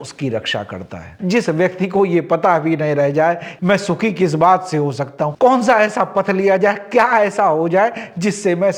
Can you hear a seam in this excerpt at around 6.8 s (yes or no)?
no